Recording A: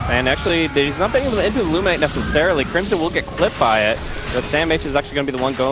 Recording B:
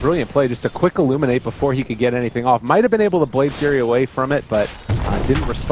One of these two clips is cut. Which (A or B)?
A